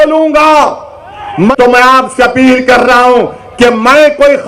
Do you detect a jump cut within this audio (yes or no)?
yes